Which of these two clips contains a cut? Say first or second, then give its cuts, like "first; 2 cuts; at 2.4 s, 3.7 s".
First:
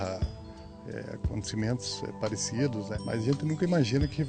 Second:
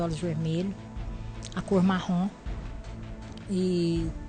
first; 1 cut; at 2.9 s